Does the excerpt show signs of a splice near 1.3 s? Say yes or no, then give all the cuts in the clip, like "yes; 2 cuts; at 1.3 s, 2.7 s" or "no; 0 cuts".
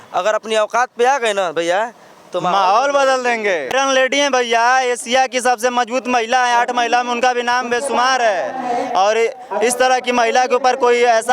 no; 1 cut; at 3.7 s